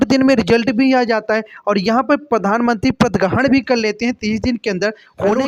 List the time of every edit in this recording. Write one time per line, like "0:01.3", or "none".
none